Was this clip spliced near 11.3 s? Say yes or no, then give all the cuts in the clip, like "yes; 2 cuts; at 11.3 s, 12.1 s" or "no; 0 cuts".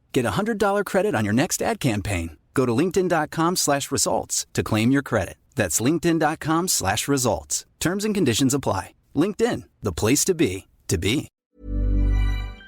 yes; 1 cut; at 11.3 s